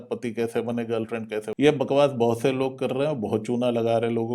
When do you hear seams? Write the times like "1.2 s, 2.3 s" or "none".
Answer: 1.5 s